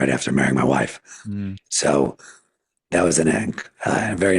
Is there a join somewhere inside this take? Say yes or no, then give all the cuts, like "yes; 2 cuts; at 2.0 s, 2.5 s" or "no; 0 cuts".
no; 0 cuts